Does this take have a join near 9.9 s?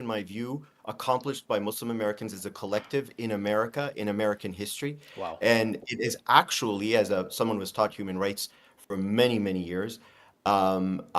no; 0 cuts

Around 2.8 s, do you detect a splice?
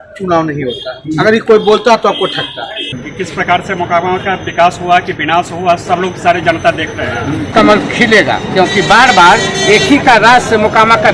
yes; 2 cuts; at 2.8 s, 7.5 s

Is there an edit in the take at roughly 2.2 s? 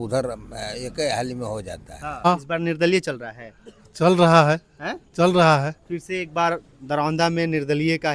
yes; 1 cut; at 2.2 s

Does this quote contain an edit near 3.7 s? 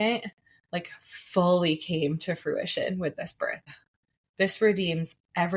yes; 1 cut; at 3.7 s

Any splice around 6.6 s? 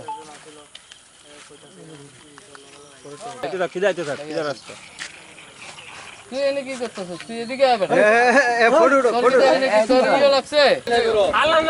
no; 1 cut; at 3.4 s

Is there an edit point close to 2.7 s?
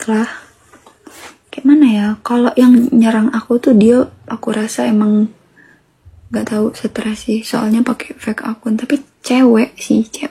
no; 0 cuts

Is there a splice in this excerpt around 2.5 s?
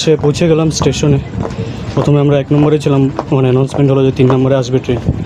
no; 0 cuts

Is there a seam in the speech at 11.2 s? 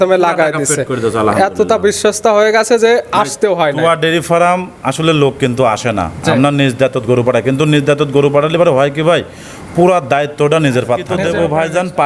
yes; 1 cut; at 11.2 s

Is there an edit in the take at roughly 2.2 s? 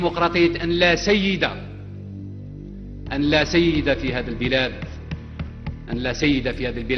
no; 0 cuts

